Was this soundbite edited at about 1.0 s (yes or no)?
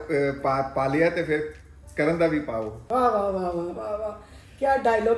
no